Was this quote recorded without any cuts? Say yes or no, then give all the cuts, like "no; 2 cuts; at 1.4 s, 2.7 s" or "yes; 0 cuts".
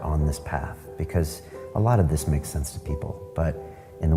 yes; 0 cuts